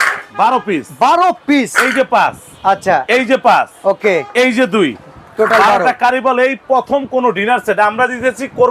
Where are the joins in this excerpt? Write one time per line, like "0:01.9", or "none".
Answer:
none